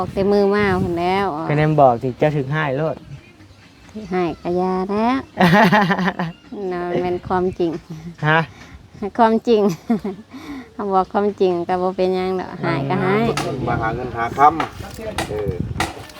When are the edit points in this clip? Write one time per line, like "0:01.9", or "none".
0:13.5

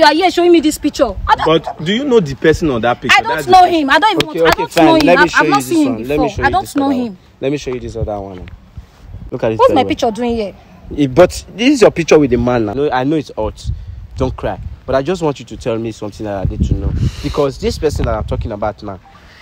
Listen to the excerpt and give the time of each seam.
0:09.2
0:12.7

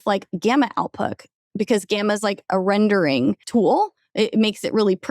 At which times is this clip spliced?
0:03.4

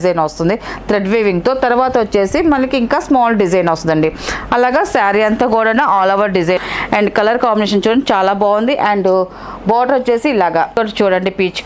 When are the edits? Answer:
0:06.6
0:10.8

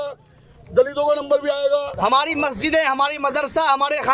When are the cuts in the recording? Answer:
0:01.9

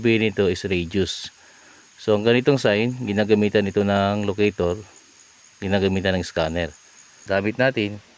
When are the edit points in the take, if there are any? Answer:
0:07.1

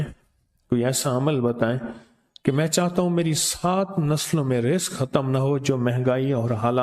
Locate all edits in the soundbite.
none

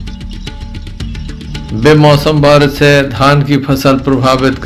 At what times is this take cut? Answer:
0:01.3

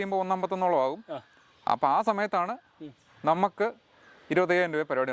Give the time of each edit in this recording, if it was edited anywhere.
none

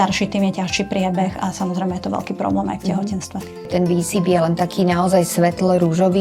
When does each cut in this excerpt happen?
0:03.7

